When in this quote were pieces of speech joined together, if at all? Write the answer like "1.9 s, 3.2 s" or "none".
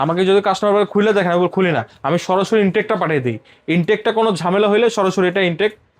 none

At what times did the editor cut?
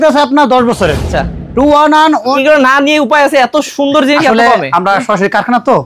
1.1 s, 2.3 s

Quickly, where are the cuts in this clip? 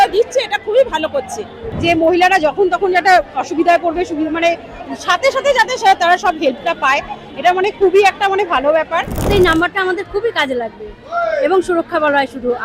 1.6 s, 9.3 s

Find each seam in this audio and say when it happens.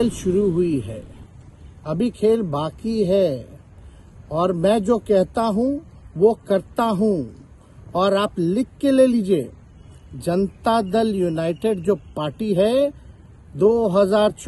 none

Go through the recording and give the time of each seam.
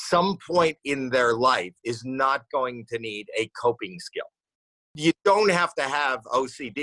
none

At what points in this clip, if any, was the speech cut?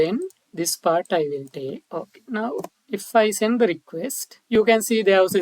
1.8 s, 4.3 s

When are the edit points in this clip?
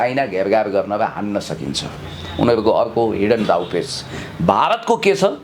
none

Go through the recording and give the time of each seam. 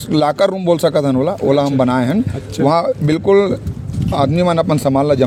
none

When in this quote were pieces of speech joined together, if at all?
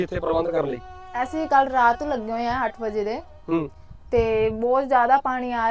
none

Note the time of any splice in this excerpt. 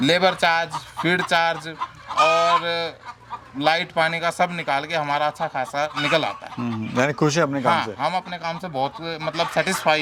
none

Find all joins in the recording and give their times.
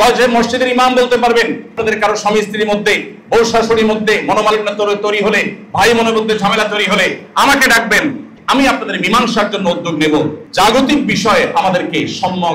1.8 s, 8.3 s, 10.4 s

